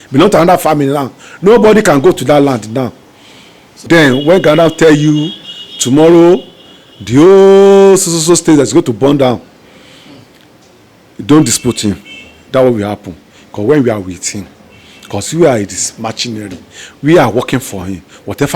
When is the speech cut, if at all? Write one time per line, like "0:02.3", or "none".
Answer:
0:03.8